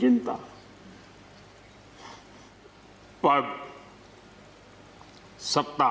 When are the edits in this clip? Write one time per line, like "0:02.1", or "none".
0:02.6